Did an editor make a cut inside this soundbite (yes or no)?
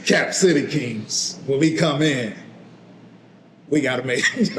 no